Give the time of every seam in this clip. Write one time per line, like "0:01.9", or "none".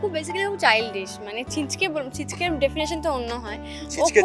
none